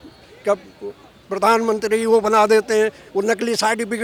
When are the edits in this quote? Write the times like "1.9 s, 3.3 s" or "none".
none

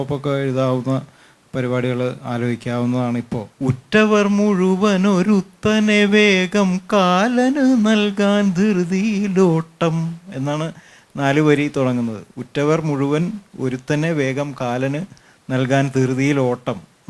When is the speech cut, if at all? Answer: 3.4 s

